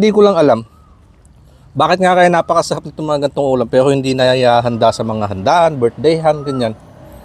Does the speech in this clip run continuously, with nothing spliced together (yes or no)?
yes